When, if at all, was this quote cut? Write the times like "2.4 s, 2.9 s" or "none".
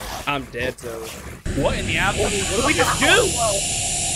1.5 s